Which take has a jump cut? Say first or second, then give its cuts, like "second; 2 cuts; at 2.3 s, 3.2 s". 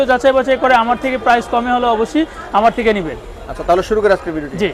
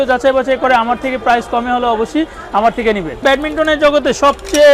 second; 1 cut; at 3.2 s